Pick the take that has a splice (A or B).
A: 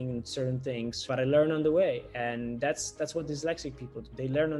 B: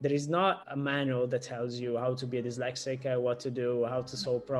A